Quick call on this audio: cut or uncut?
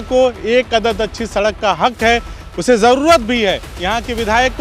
uncut